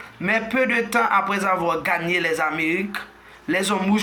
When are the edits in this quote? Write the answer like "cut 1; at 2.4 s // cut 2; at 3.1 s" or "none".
none